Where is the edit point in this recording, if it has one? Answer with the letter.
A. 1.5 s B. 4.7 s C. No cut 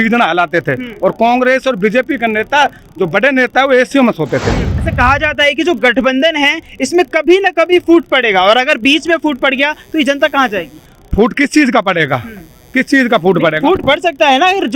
B